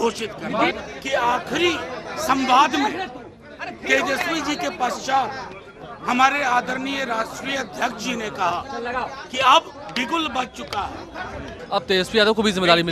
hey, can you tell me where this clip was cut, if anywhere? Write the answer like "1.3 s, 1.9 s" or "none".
0.7 s, 11.6 s